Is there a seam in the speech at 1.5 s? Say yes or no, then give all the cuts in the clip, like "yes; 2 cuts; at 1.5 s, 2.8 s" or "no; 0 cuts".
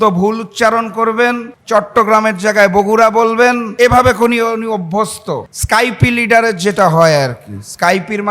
yes; 3 cuts; at 1.5 s, 3.7 s, 5.5 s